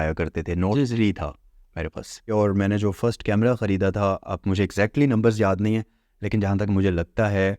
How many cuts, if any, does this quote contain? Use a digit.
1